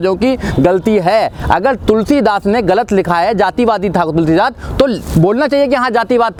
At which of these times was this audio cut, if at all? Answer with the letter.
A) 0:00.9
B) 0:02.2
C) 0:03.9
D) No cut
D